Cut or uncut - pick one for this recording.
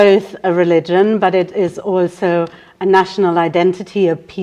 uncut